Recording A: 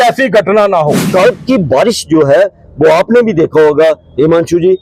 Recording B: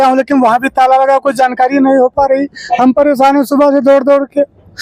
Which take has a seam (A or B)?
A